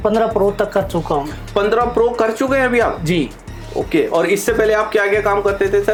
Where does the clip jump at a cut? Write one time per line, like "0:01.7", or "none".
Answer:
none